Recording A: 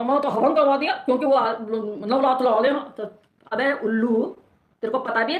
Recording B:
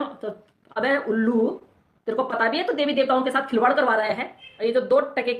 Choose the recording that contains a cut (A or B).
B